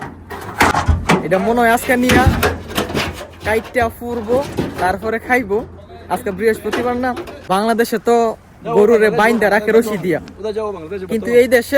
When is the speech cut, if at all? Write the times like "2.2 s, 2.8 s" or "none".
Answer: 7.3 s